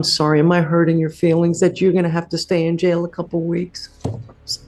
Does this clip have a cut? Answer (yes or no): no